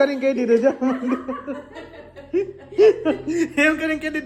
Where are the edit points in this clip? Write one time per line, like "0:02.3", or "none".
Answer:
none